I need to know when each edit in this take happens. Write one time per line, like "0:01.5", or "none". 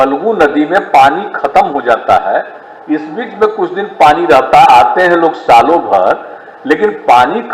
none

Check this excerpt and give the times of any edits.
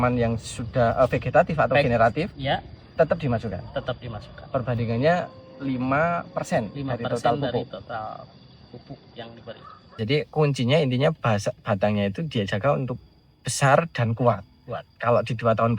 0:10.0

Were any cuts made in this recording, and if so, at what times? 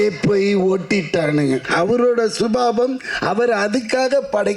0:01.7

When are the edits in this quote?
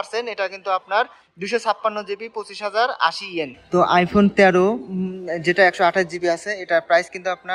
0:03.6

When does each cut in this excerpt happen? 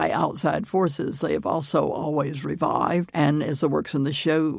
0:03.1

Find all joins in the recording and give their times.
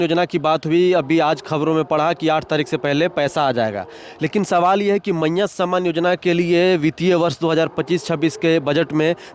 none

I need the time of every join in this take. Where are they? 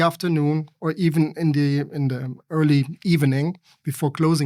none

